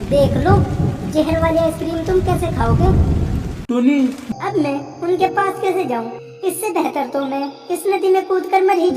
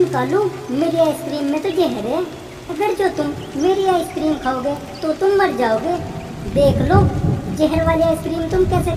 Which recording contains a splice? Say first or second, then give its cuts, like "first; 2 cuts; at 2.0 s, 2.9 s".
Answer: first; 1 cut; at 4.2 s